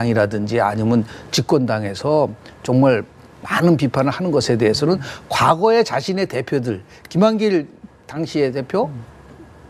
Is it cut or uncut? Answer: uncut